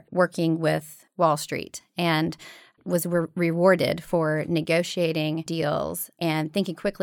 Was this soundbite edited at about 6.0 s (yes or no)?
yes